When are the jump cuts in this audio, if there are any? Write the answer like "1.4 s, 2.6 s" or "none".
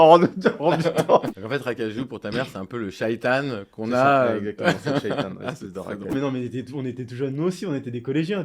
1.3 s, 6.1 s